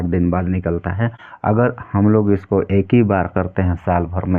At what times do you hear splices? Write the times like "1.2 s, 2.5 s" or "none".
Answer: 1.2 s